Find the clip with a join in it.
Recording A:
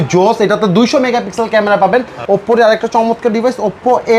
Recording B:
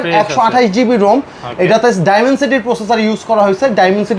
A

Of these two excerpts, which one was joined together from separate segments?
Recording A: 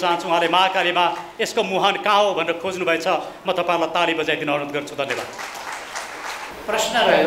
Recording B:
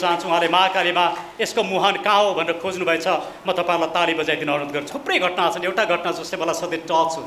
B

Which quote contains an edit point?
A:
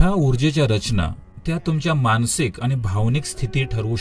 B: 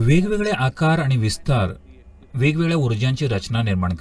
A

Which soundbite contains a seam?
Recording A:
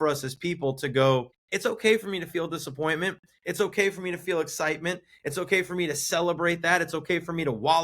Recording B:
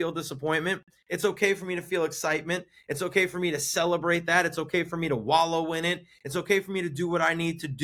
A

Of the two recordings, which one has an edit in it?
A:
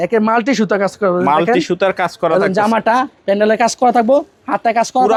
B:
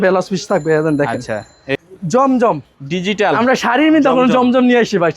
B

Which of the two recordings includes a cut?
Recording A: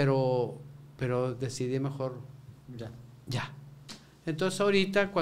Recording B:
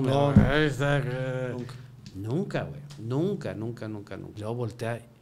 B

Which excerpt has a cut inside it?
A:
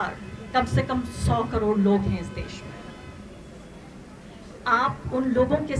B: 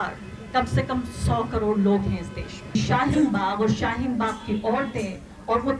B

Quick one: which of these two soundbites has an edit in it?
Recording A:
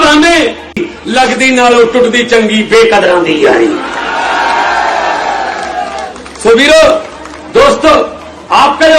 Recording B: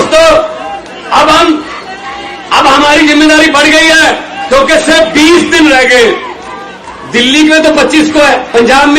A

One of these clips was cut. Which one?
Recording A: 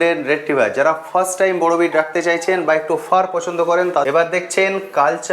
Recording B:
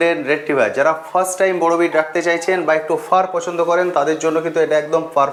A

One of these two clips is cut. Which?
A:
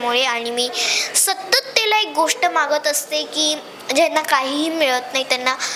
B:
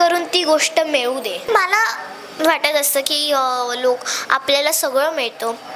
B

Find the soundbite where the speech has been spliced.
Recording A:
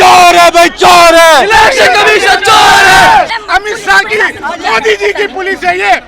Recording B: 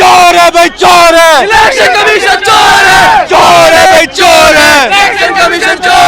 A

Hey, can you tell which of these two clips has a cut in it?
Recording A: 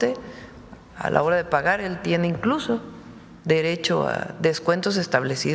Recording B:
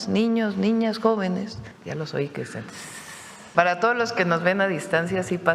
B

